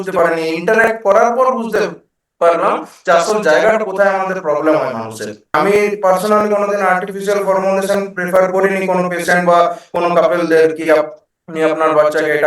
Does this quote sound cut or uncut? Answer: cut